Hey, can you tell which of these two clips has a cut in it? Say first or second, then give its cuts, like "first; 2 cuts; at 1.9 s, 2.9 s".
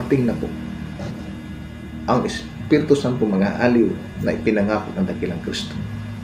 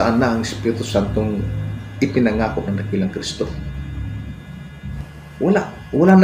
second; 1 cut; at 5.4 s